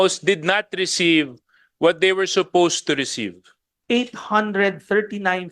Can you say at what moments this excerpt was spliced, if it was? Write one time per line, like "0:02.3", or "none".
0:03.7